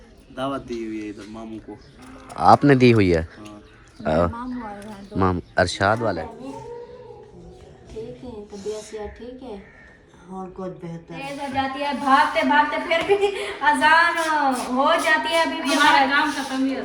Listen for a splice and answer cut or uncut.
cut